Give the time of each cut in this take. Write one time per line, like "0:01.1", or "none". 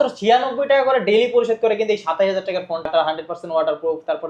0:02.9